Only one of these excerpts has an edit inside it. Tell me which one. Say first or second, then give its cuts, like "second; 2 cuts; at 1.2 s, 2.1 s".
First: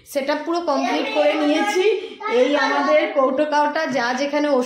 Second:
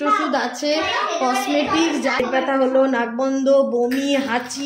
second; 1 cut; at 2.2 s